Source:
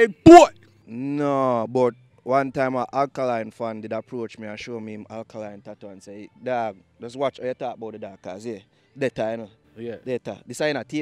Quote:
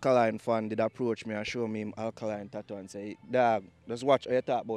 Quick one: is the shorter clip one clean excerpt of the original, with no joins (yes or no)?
yes